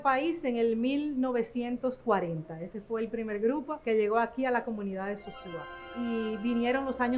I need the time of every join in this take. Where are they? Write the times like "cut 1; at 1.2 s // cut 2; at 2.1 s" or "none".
cut 1; at 3.7 s // cut 2; at 5.9 s